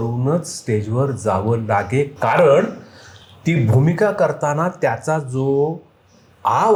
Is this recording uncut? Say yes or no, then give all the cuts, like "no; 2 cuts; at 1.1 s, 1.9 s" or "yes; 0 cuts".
yes; 0 cuts